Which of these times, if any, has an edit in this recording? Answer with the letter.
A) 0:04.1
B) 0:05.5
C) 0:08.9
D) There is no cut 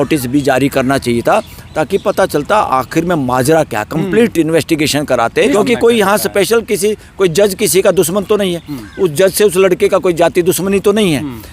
B